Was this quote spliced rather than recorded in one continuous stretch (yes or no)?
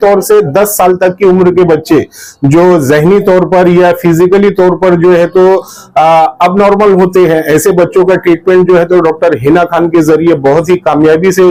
no